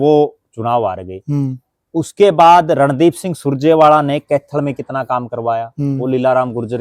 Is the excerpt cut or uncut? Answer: uncut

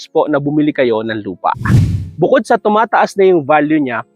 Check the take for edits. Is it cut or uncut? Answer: cut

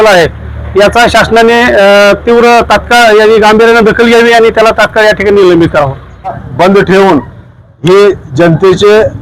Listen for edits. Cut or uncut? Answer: cut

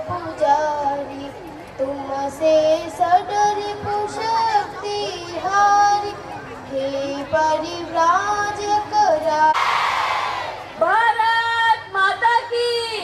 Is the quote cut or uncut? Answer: uncut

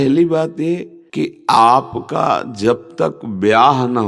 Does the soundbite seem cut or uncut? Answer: cut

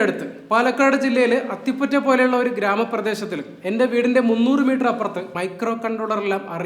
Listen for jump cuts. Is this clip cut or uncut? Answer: cut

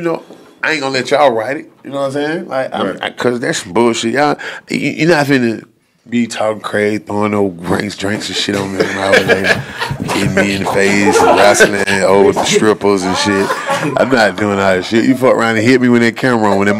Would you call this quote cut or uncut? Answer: uncut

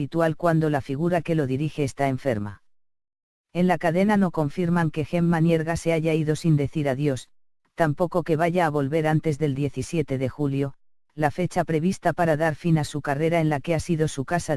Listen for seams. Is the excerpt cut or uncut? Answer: cut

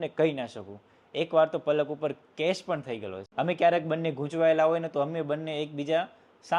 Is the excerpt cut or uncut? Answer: cut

